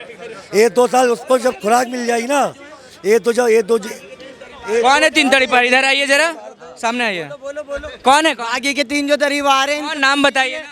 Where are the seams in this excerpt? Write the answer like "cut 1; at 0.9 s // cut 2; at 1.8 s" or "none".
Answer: none